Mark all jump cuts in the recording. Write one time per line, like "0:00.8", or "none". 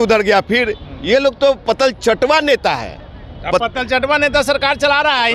none